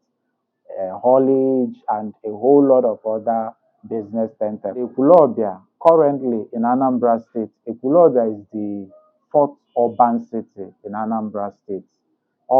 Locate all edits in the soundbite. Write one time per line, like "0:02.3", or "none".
0:04.9